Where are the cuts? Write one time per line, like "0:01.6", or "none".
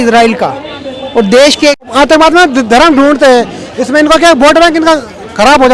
0:01.9